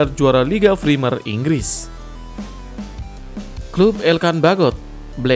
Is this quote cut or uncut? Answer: uncut